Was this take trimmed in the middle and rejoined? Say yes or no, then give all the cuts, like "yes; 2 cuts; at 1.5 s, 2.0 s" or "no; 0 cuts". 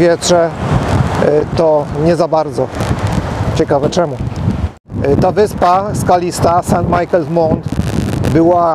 no; 0 cuts